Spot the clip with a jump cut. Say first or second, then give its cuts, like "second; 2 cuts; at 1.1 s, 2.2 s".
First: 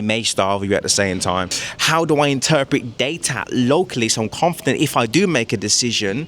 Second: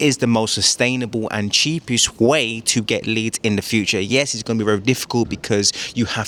first; 1 cut; at 1.6 s